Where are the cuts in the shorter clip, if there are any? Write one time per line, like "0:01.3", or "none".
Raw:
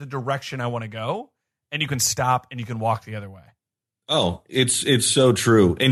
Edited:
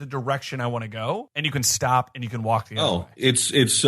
0:01.3
0:02.7

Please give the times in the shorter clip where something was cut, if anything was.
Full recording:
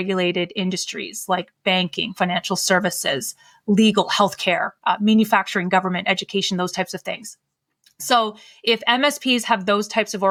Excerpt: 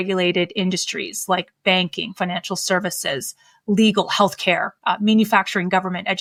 none

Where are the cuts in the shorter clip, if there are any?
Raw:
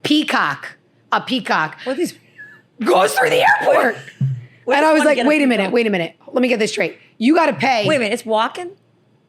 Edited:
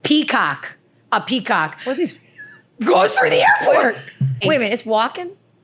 0:04.4

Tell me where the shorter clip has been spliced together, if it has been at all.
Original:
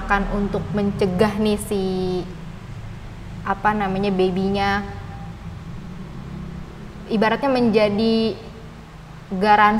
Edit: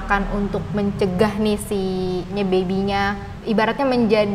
0:02.3
0:03.3

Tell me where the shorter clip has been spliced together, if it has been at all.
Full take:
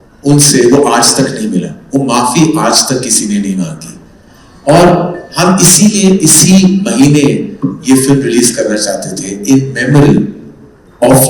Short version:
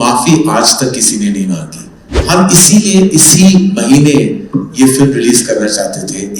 0:02.1

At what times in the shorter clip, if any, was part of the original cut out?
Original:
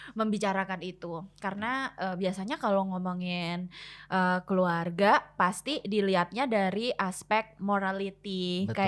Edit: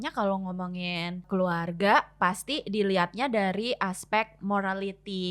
0:01.3

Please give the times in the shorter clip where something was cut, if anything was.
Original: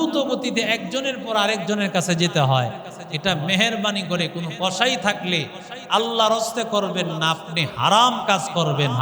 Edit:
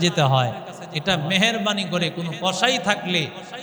none

